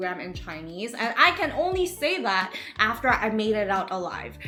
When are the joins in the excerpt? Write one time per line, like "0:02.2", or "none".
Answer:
none